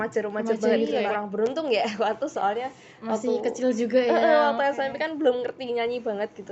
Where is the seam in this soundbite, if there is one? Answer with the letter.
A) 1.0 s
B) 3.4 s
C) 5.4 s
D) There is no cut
A